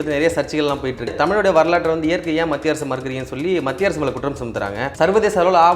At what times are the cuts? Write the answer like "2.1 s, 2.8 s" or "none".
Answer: 1.1 s, 4.8 s